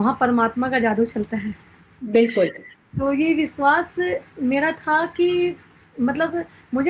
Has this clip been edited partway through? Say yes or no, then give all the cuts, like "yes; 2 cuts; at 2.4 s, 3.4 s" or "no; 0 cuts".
no; 0 cuts